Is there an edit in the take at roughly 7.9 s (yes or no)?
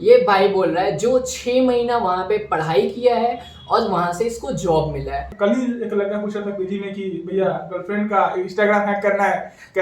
no